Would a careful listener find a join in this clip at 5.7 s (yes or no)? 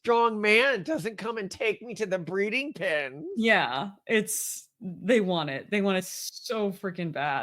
no